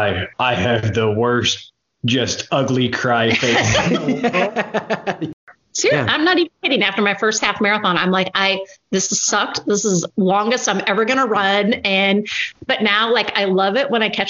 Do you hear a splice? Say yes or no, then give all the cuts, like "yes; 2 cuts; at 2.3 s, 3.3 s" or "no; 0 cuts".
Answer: yes; 1 cut; at 5.2 s